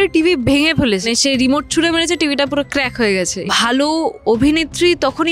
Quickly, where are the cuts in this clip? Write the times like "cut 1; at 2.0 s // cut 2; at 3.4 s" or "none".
cut 1; at 1.0 s // cut 2; at 3.3 s